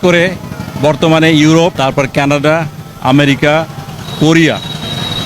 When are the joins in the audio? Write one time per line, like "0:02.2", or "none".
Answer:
0:01.8